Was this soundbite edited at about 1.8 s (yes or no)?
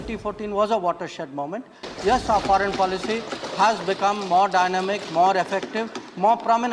yes